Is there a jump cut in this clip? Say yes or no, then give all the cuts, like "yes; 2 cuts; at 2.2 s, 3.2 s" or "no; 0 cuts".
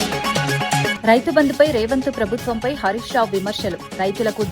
yes; 1 cut; at 0.9 s